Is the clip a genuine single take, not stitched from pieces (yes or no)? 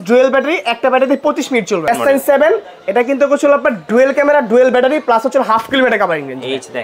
no